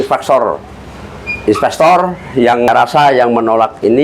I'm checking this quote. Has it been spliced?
yes; 1 cut; at 2.7 s

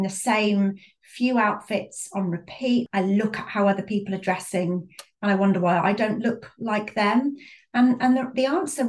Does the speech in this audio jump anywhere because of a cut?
yes; 1 cut; at 2.9 s

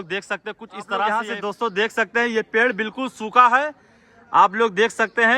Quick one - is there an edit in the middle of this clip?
yes; 1 cut; at 1.3 s

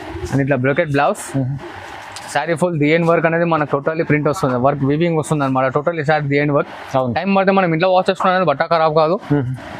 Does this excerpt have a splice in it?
no; 0 cuts

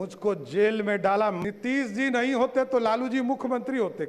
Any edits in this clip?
yes; 1 cut; at 1.4 s

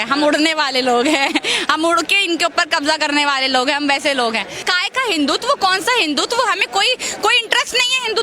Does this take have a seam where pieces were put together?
yes; 1 cut; at 4.7 s

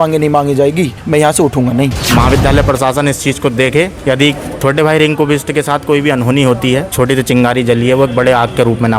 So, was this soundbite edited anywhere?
yes; 4 cuts; at 1.0 s, 2.0 s, 4.1 s, 6.9 s

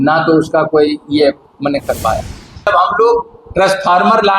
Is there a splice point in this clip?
yes; 1 cut; at 2.7 s

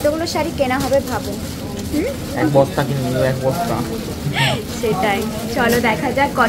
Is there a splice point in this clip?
no; 0 cuts

